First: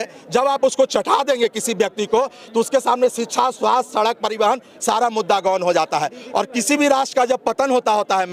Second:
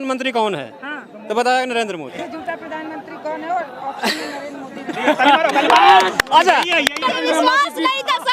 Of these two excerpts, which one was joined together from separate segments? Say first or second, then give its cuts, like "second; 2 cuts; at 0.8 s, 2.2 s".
second; 2 cuts; at 2.1 s, 7.0 s